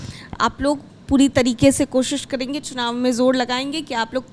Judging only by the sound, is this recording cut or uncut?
uncut